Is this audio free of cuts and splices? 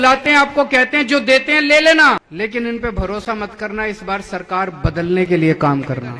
no; 1 cut; at 2.3 s

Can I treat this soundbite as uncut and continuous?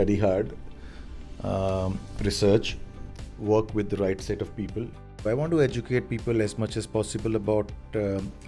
no; 1 cut; at 5.3 s

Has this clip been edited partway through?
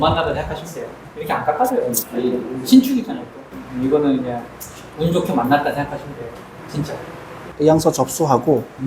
yes; 1 cut; at 7.4 s

